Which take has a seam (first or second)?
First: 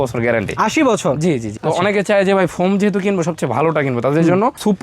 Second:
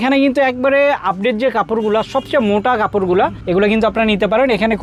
first